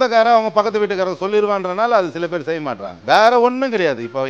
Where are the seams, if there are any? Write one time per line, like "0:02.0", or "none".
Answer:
0:03.0